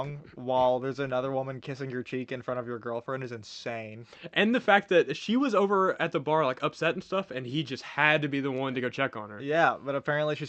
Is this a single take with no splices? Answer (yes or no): yes